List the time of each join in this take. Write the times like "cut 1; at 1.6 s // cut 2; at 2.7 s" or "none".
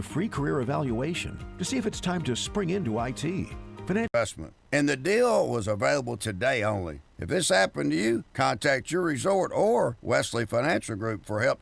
cut 1; at 4.1 s